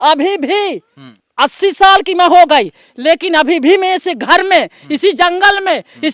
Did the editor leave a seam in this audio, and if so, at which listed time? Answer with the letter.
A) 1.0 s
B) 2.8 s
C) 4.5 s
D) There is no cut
A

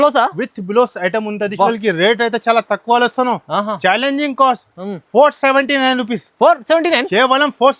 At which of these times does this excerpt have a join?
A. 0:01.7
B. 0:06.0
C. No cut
A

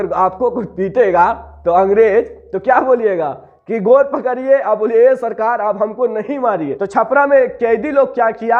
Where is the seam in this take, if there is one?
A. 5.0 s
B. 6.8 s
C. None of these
B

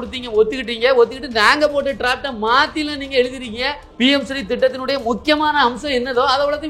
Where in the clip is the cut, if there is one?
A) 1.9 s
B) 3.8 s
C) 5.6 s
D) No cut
B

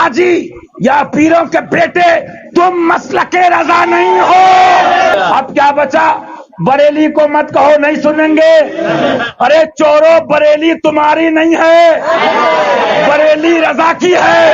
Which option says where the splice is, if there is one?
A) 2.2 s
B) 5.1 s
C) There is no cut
B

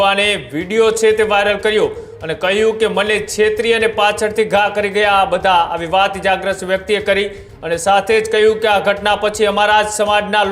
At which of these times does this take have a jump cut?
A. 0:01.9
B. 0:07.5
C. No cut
C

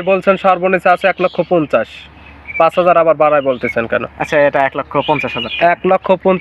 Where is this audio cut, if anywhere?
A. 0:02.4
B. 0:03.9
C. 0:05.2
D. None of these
D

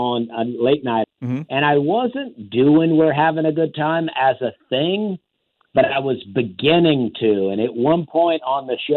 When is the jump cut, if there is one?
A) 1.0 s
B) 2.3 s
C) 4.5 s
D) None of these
A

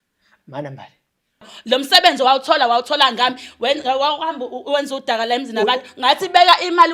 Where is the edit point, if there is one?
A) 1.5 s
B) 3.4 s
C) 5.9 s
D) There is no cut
A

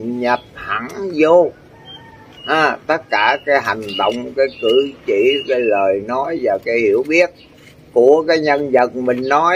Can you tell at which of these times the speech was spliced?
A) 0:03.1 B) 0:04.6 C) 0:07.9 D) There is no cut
D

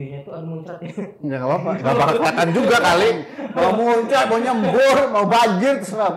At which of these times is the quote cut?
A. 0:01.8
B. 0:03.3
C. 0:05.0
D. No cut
D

